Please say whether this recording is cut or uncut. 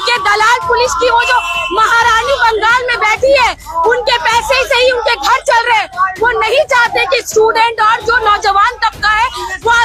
uncut